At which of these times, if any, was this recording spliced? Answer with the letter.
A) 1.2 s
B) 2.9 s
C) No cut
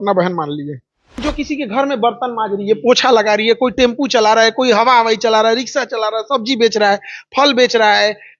A